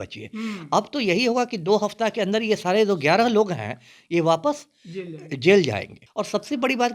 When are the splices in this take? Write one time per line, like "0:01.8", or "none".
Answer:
0:06.0